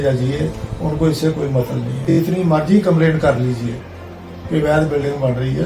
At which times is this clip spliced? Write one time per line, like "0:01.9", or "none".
0:02.1